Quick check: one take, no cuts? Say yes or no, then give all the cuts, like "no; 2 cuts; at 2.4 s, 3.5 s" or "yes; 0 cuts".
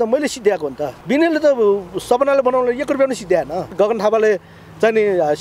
no; 2 cuts; at 0.9 s, 3.7 s